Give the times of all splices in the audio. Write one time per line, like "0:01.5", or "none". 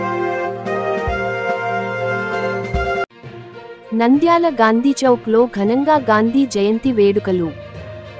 0:01.8
0:02.6